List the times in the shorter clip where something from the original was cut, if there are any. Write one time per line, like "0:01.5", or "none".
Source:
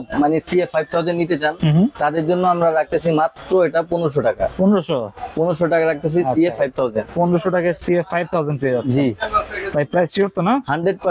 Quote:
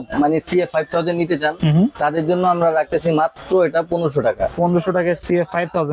0:04.5